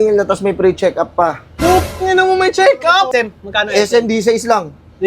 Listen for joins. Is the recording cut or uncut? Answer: cut